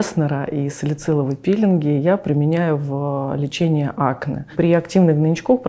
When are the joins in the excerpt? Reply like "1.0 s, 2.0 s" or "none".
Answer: 4.5 s